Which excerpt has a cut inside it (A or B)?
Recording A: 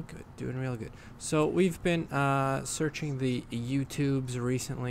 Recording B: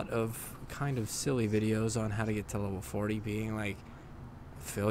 B